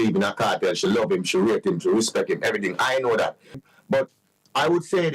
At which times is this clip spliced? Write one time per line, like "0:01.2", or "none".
0:03.6